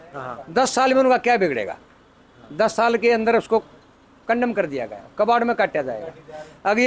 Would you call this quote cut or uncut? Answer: uncut